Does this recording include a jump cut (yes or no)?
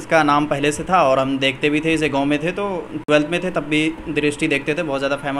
no